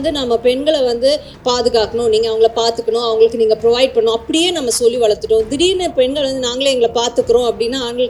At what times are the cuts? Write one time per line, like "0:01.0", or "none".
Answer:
none